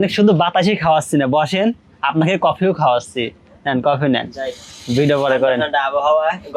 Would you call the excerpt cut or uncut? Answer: uncut